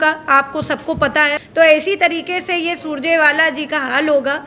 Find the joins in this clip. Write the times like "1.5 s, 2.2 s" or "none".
1.4 s